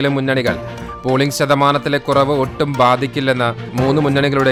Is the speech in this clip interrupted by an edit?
no; 0 cuts

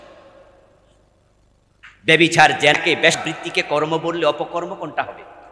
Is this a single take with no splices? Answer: no; 1 cut; at 3.1 s

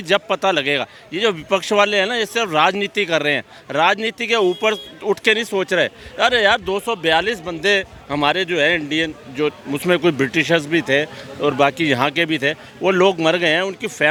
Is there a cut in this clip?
no; 0 cuts

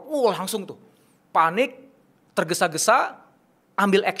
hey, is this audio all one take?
yes; 0 cuts

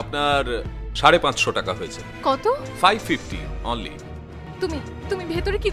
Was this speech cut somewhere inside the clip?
yes; 1 cut; at 4.4 s

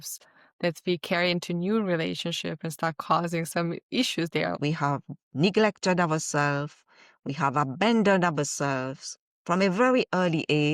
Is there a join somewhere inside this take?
yes; 1 cut; at 4.6 s

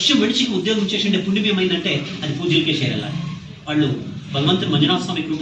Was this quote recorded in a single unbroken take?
yes; 0 cuts

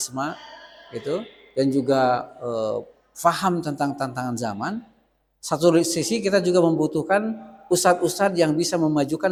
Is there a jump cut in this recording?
no; 0 cuts

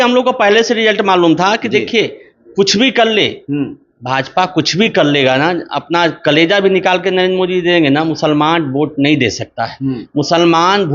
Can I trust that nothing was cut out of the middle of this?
yes; 0 cuts

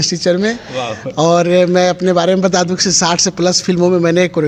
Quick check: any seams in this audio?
no; 0 cuts

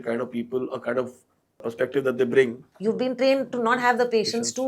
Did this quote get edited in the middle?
yes; 2 cuts; at 1.6 s, 2.7 s

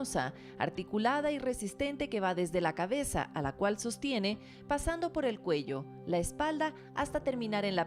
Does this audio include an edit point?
no; 0 cuts

